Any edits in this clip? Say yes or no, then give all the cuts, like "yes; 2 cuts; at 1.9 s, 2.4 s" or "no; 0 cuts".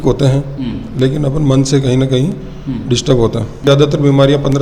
yes; 1 cut; at 3.7 s